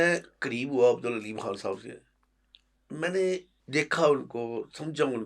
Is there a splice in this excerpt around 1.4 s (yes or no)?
no